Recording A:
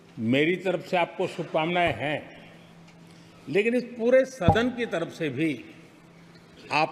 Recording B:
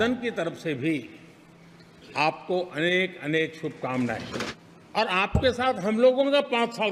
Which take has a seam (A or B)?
B